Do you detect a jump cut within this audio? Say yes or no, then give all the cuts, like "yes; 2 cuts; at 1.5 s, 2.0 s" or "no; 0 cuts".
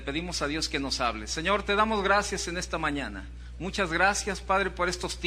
yes; 1 cut; at 4.3 s